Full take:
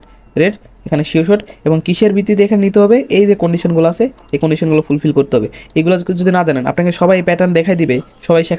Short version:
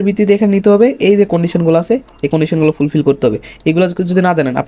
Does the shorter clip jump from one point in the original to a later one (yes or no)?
no